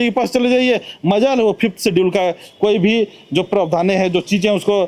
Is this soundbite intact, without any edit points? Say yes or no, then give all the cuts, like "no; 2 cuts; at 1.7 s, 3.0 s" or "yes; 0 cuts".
yes; 0 cuts